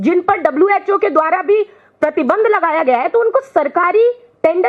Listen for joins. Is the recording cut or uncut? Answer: uncut